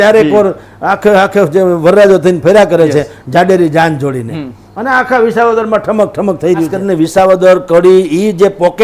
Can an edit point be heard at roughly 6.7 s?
yes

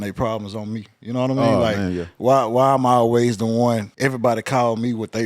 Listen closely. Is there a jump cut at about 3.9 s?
yes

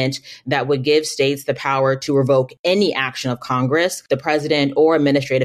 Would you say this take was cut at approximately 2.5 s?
yes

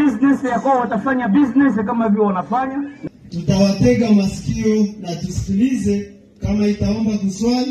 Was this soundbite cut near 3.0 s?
yes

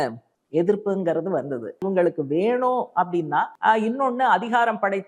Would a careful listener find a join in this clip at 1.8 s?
yes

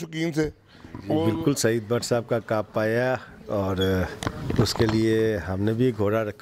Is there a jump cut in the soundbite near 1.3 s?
yes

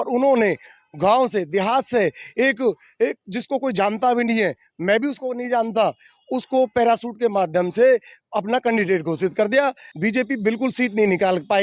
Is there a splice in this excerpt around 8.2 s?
no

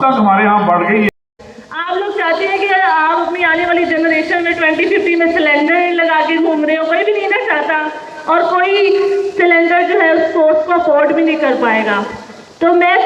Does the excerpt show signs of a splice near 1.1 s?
yes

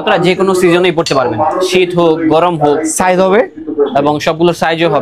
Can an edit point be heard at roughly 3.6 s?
no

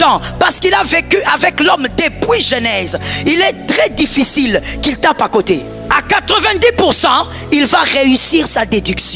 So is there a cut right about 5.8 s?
yes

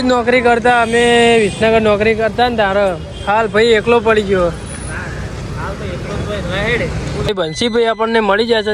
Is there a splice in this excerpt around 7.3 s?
yes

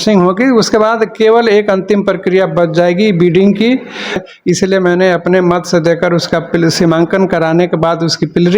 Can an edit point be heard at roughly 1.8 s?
no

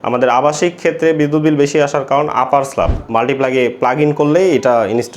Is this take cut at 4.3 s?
no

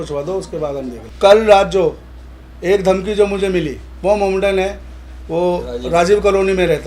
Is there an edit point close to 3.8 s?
no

